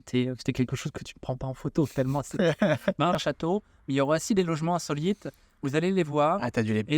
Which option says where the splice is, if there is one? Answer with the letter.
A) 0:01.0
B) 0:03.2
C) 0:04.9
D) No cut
B